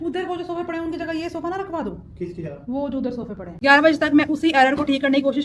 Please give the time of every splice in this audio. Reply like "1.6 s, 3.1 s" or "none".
3.5 s